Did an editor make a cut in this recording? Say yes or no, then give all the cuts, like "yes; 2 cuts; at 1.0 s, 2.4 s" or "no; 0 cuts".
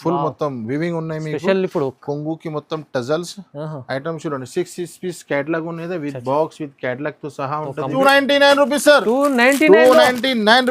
yes; 1 cut; at 8.0 s